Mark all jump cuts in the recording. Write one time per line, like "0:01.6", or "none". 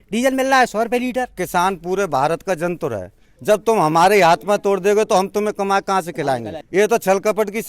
0:01.4
0:06.6